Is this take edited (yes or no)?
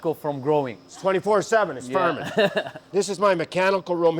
no